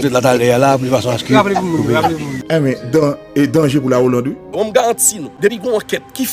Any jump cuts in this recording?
yes; 2 cuts; at 4.5 s, 5.2 s

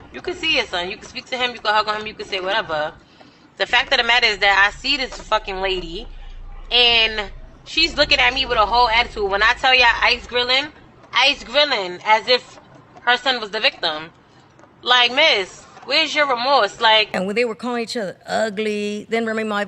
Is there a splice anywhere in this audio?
yes; 1 cut; at 17.1 s

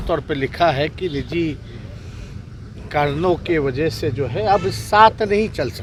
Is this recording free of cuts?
yes; 0 cuts

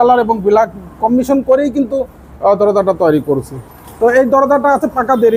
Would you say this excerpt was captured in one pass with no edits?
yes; 0 cuts

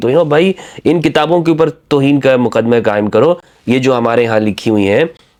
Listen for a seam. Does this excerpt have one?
no; 0 cuts

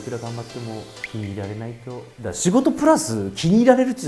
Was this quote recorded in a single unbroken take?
yes; 0 cuts

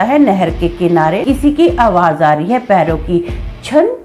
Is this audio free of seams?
no; 1 cut; at 1.2 s

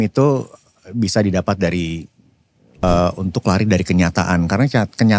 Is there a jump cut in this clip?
yes; 1 cut; at 2.8 s

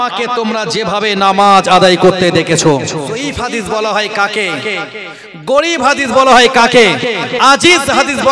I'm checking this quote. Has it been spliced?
yes; 1 cut; at 3.1 s

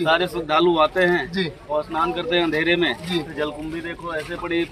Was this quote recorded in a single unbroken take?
yes; 0 cuts

